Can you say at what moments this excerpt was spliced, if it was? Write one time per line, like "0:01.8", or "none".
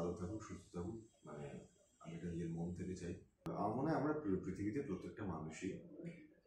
0:03.5

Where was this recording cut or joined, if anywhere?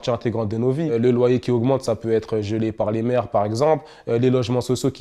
0:00.9

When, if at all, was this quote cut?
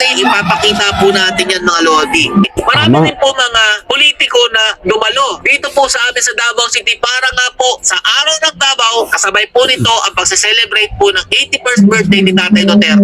0:02.4

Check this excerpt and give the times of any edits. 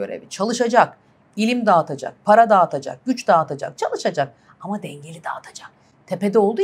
none

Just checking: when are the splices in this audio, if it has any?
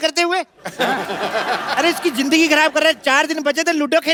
none

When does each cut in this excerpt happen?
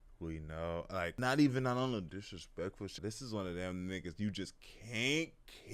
0:01.1
0:02.9

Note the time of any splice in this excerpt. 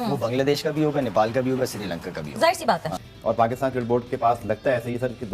0:02.8

